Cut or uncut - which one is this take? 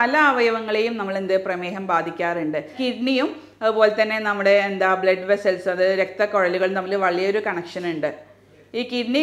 cut